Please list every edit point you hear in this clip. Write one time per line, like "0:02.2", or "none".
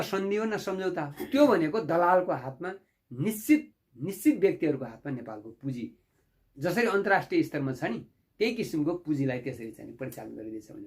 0:01.2